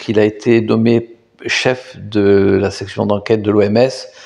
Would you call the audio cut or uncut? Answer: uncut